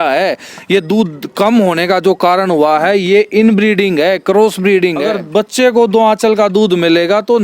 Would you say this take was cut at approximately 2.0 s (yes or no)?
no